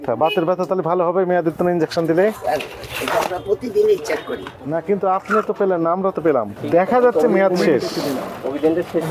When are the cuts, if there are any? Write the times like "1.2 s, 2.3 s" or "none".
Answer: 4.6 s, 6.5 s